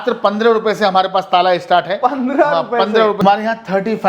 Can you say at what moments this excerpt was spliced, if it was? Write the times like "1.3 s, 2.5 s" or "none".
3.2 s